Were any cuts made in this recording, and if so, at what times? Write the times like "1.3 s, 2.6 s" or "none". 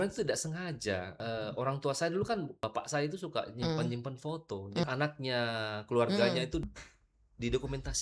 1.1 s, 2.5 s, 4.8 s, 6.6 s